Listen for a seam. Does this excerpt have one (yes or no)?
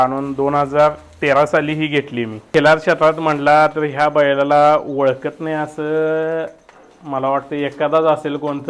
yes